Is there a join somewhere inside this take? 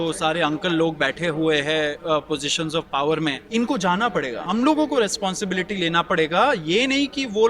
yes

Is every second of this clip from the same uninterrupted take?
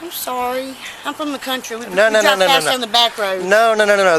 yes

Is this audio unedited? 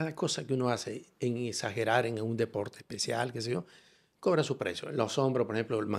yes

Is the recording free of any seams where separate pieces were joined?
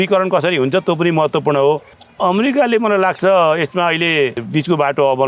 no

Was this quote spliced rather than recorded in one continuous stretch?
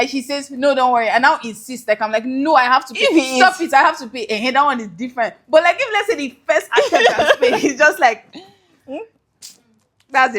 no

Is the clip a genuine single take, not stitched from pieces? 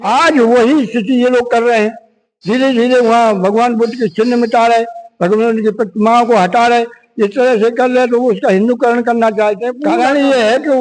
no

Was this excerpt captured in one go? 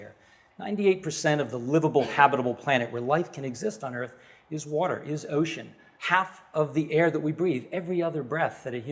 no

